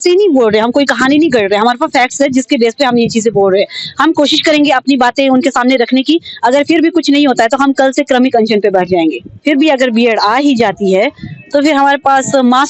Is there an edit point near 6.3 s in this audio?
no; 1 cut; at 9.3 s

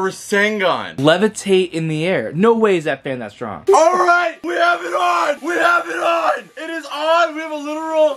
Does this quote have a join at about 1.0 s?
yes; 2 cuts; at 1.0 s, 3.6 s

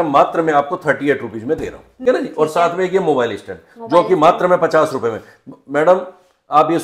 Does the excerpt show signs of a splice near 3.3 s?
no; 1 cut; at 2.0 s

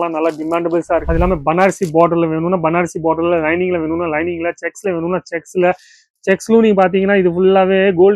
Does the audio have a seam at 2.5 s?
no; 1 cut; at 1.0 s

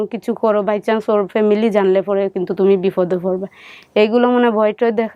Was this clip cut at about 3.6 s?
no; 0 cuts

